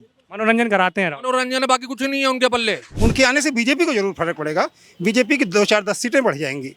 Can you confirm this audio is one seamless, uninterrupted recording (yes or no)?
no